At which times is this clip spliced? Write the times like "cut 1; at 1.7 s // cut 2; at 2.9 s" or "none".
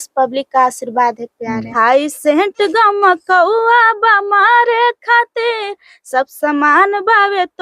cut 1; at 1.7 s